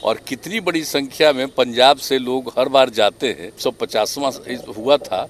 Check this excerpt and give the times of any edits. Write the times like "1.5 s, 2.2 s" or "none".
3.5 s